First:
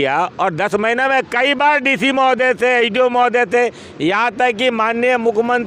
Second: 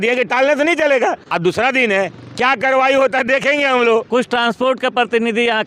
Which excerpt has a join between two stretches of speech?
second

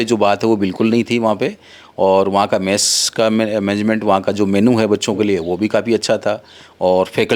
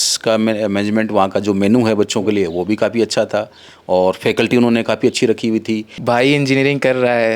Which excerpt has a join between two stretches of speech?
second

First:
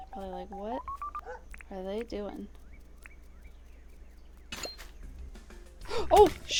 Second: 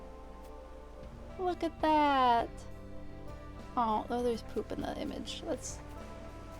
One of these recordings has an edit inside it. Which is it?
second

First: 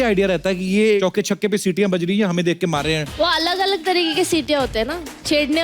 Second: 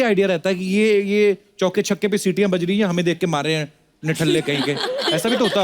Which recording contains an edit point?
first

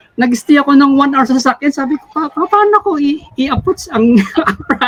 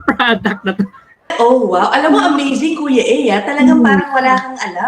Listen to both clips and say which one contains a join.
second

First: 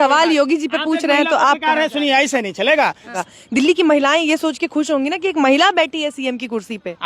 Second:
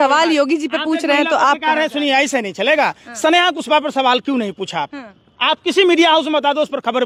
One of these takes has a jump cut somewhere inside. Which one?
first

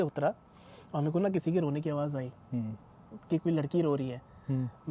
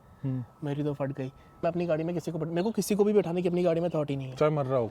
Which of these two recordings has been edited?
second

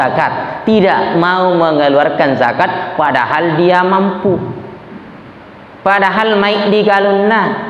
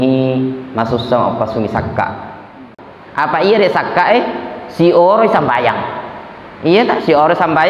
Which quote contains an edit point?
second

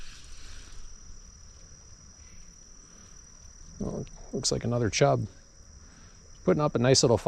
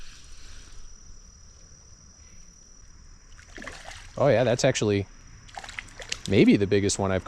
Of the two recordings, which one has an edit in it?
second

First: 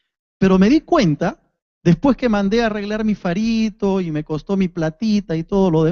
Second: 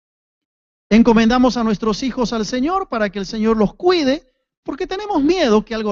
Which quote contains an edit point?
first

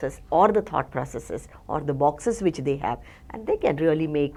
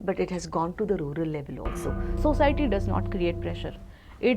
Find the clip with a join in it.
second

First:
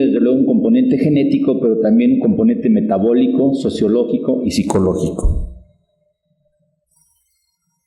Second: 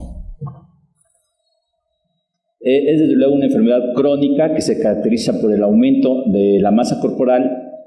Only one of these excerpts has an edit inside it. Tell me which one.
second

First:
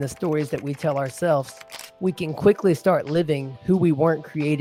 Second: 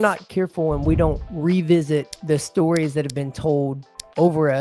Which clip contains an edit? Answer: second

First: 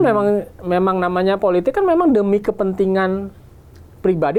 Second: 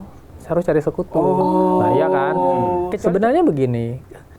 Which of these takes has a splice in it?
second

